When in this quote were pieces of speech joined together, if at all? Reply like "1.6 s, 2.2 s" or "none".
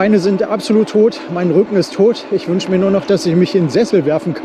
none